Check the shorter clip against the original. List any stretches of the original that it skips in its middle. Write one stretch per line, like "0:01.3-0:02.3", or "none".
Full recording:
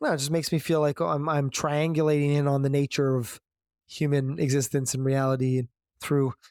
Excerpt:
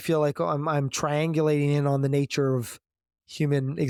none